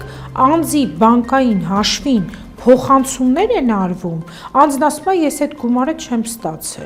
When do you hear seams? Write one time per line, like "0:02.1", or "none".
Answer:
none